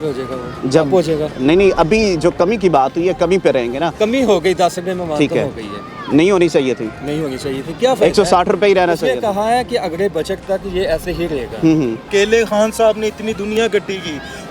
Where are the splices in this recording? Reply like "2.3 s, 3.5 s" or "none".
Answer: 12.0 s